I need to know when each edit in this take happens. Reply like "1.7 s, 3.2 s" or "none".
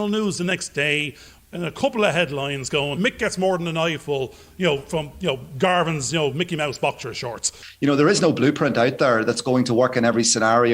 3.0 s, 7.6 s

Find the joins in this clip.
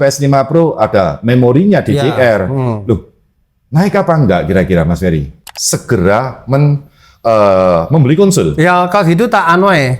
5.3 s

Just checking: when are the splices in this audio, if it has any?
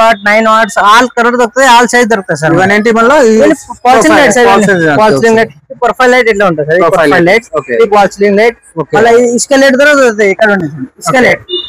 none

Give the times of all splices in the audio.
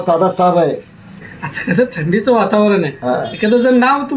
1.2 s

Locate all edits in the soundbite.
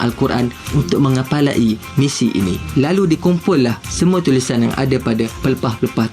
3.2 s

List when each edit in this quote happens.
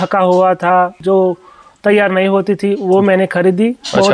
1.0 s

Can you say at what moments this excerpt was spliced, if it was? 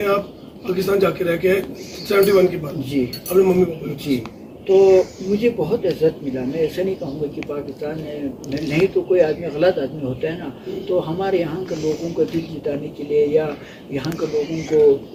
none

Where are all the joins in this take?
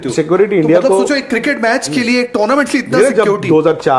none

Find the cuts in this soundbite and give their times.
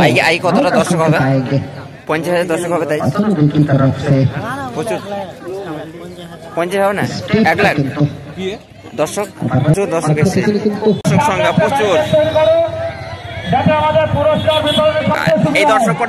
11.0 s

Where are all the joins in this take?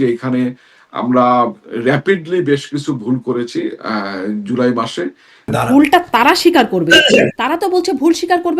5.5 s

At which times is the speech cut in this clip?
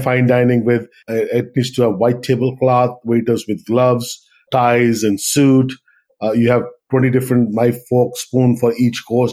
1.0 s, 4.4 s, 6.1 s

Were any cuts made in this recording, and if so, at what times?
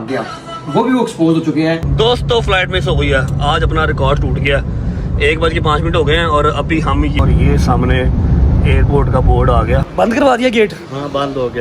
1.9 s, 7.2 s, 10.0 s

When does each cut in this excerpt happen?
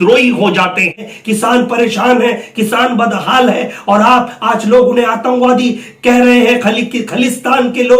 1.1 s

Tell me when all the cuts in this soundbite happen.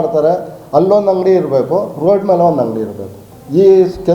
none

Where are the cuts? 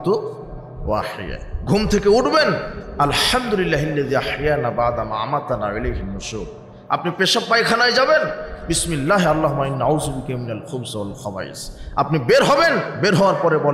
none

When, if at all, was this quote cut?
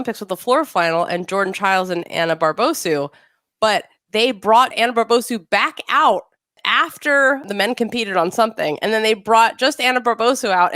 4.7 s, 6.5 s, 7.4 s

